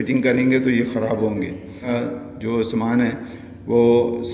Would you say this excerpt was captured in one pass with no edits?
no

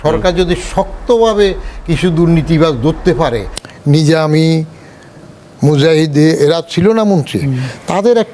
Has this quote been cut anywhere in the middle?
yes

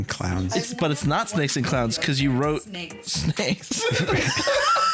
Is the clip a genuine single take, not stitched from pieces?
yes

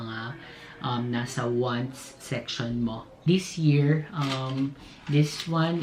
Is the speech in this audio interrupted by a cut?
yes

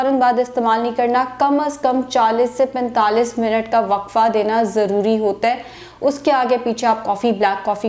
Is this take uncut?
yes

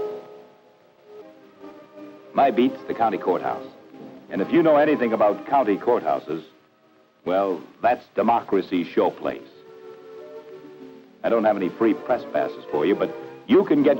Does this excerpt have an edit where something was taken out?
no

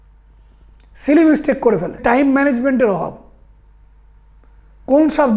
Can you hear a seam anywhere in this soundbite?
yes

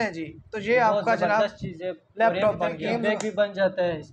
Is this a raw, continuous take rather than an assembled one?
no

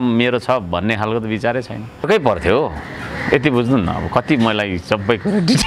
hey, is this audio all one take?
no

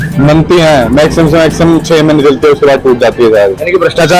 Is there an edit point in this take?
no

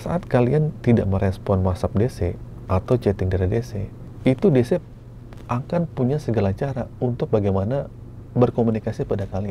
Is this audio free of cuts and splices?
yes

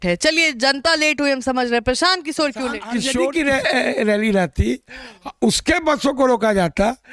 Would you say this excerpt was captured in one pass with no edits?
no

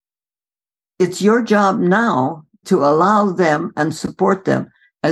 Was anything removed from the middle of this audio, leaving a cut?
yes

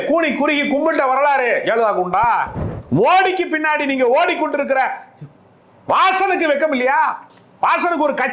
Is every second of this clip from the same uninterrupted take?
no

